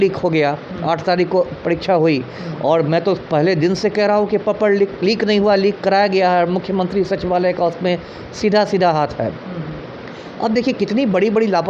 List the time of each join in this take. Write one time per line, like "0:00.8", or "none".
none